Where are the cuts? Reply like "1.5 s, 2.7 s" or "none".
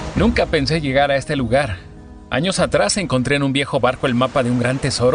none